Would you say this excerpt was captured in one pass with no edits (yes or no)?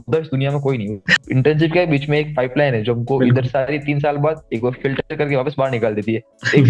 no